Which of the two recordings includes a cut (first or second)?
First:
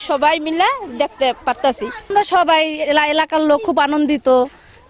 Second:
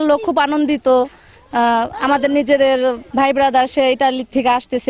first